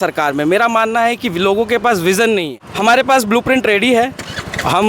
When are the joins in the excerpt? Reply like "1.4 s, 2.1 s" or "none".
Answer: 2.6 s